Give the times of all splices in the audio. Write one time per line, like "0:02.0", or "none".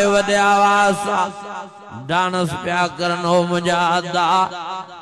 none

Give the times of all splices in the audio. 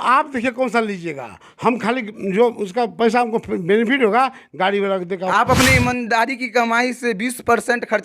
0:05.3

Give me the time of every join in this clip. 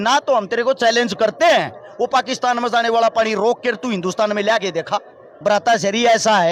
0:05.3

